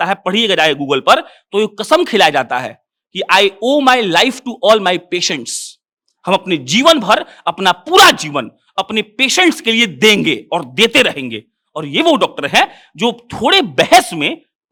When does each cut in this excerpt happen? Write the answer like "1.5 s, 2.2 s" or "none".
none